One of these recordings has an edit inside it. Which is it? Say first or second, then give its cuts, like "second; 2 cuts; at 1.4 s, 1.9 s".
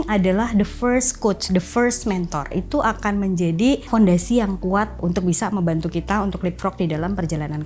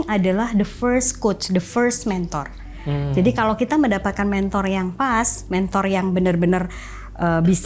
first; 3 cuts; at 2.6 s, 3.9 s, 5.0 s